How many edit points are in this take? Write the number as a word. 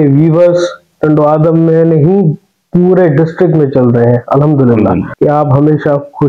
one